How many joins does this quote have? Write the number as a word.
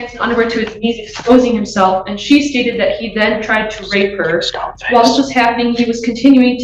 zero